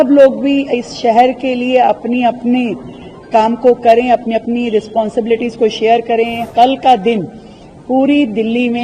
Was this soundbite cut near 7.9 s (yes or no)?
no